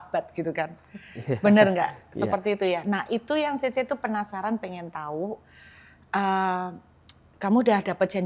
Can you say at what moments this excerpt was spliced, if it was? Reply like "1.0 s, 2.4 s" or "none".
none